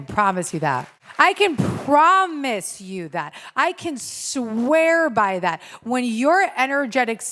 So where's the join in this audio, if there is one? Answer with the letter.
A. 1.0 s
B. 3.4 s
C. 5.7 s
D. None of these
A